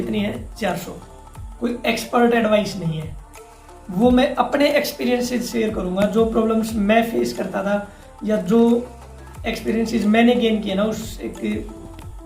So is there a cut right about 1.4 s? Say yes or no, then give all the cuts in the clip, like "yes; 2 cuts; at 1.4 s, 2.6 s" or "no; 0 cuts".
yes; 1 cut; at 1.4 s